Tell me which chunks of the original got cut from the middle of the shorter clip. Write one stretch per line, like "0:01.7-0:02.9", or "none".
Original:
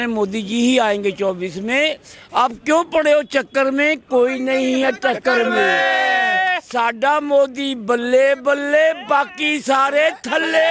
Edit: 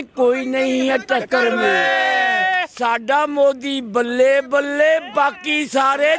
none